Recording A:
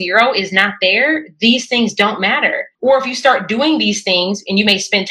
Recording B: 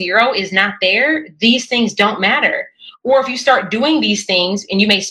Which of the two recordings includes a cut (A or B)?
A